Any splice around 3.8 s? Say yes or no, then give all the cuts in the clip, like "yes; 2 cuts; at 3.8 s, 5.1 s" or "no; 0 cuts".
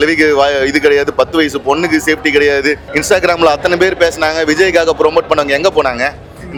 no; 0 cuts